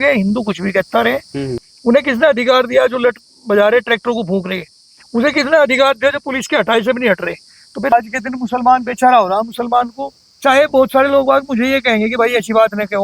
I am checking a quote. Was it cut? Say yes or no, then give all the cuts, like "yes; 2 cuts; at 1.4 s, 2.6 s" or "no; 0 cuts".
yes; 2 cuts; at 1.6 s, 7.9 s